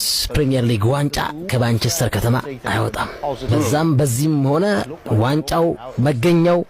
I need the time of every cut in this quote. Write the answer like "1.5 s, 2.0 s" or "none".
3.5 s